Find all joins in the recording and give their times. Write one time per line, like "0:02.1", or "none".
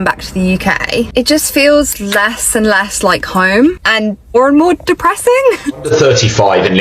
0:05.8